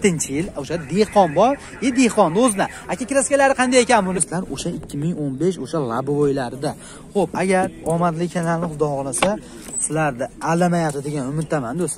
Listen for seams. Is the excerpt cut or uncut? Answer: cut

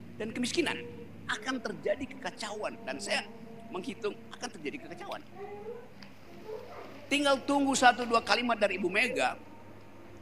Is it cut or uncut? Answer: cut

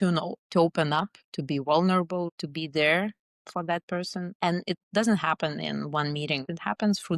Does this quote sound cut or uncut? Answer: uncut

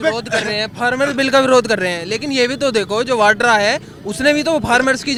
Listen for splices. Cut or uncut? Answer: uncut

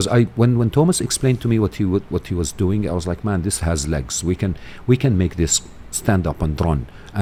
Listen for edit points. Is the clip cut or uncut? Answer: uncut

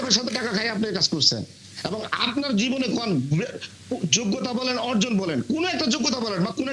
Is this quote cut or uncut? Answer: uncut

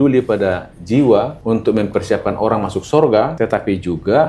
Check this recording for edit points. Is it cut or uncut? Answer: cut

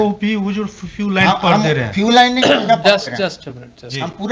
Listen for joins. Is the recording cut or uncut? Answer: uncut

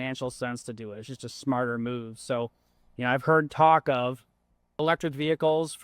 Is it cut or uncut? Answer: cut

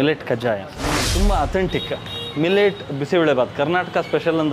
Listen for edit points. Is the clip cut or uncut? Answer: cut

